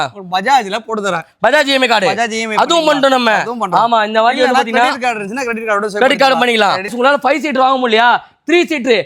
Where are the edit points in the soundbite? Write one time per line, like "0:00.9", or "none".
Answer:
0:06.9